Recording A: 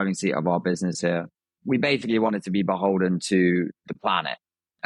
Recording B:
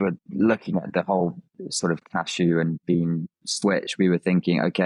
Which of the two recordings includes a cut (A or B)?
A